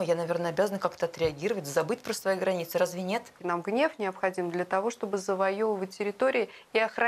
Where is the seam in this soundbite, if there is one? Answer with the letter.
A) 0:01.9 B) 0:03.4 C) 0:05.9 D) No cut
B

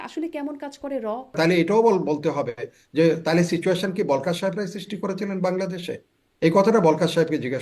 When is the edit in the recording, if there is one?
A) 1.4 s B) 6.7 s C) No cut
A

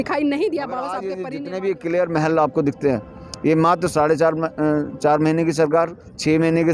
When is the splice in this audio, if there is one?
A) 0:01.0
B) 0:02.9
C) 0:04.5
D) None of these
A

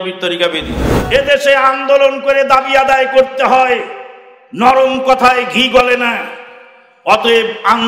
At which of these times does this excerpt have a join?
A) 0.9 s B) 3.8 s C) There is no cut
A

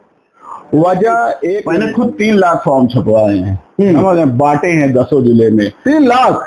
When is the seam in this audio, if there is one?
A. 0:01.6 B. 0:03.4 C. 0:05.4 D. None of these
A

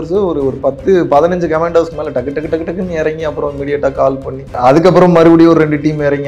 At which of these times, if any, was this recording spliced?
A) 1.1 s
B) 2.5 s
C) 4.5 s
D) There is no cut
C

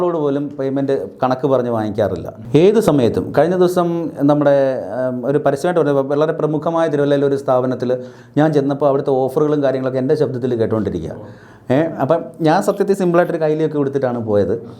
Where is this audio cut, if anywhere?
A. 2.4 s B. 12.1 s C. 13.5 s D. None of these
A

